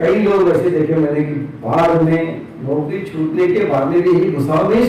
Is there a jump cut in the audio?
no; 0 cuts

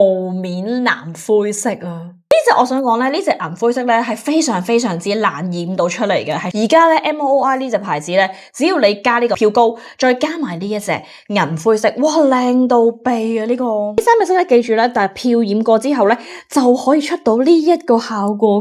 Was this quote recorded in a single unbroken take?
yes; 0 cuts

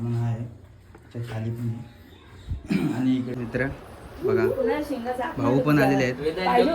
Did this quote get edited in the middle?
yes; 1 cut; at 3.3 s

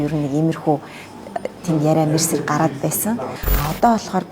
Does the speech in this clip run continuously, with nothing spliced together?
no; 1 cut; at 3.3 s

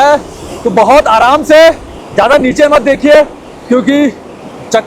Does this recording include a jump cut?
no; 0 cuts

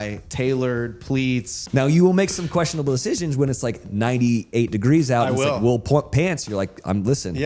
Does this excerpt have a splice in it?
yes; 1 cut; at 1.6 s

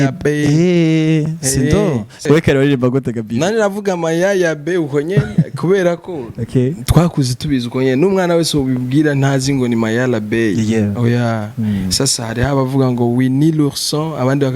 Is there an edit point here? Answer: yes; 1 cut; at 2.1 s

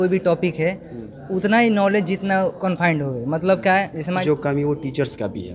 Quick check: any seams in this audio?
yes; 1 cut; at 4.2 s

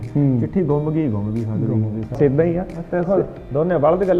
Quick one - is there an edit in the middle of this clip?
yes; 1 cut; at 2.2 s

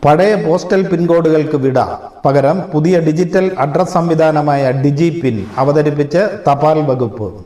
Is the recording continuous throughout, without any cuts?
yes; 0 cuts

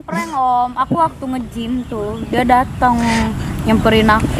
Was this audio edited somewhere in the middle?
no; 0 cuts

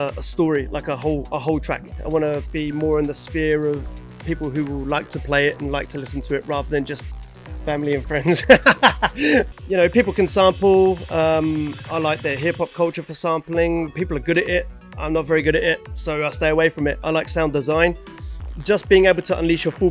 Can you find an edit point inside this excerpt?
yes; 3 cuts; at 2.0 s, 9.6 s, 18.4 s

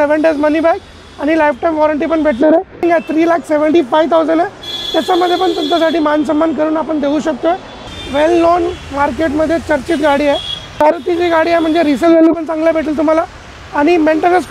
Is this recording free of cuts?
no; 3 cuts; at 2.8 s, 7.9 s, 10.8 s

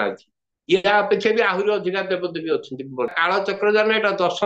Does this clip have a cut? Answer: yes; 1 cut; at 3.1 s

